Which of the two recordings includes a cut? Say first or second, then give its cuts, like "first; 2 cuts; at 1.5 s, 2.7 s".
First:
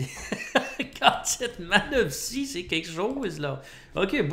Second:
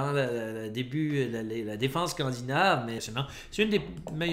second; 1 cut; at 3.0 s